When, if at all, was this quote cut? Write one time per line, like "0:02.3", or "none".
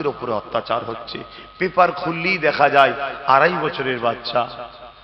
none